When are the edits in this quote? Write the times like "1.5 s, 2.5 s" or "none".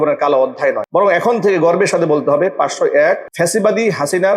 0.8 s, 3.3 s